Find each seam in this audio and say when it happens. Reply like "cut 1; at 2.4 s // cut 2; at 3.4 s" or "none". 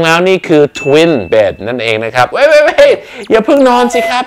cut 1; at 2.3 s